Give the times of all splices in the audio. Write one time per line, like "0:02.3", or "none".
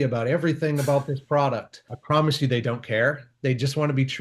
0:01.9